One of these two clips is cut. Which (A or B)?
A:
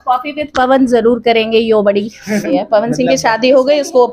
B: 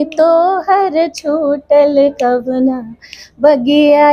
A